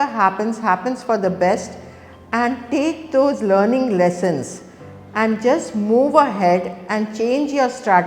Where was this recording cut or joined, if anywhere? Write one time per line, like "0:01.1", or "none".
none